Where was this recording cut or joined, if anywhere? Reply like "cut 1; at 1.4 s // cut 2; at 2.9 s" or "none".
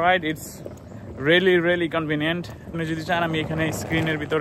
cut 1; at 2.7 s